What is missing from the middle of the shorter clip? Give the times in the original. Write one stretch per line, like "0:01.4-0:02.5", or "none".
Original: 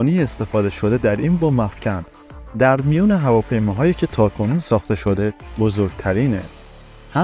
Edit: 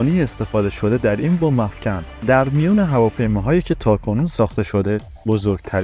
0:02.1-0:02.4